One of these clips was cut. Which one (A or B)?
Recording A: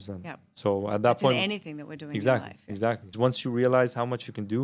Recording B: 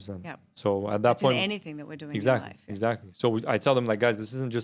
A